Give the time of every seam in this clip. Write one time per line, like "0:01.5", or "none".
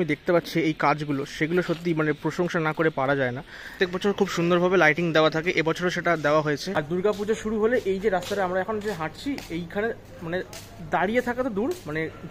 0:03.7
0:06.9